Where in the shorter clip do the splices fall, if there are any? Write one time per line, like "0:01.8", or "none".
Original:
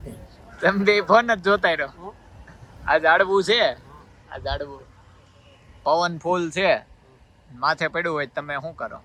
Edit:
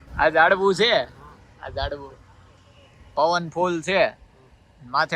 none